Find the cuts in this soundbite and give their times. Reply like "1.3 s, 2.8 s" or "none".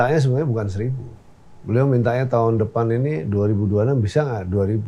none